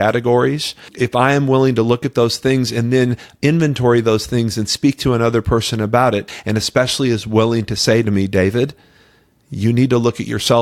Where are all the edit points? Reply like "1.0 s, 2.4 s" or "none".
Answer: 0.9 s, 6.3 s